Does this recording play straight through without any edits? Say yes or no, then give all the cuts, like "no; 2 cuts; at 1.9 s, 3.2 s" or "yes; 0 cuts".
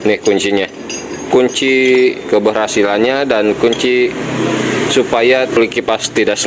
no; 1 cut; at 5.6 s